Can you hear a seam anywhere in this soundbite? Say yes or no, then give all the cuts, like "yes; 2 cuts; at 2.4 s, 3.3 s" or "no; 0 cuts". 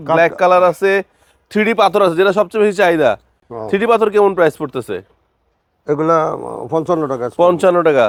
no; 0 cuts